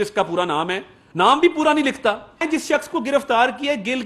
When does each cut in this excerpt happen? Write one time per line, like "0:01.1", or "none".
0:02.4